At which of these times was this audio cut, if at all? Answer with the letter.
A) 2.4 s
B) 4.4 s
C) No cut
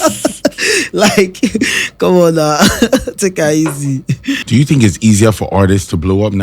B